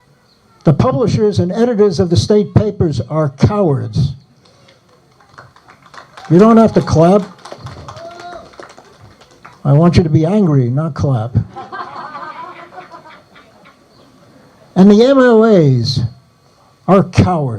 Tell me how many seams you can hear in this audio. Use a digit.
1